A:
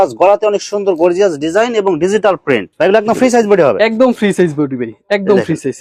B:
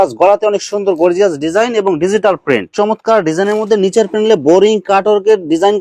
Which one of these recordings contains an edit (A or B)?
B